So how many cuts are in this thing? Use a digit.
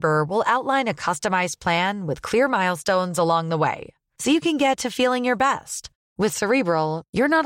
0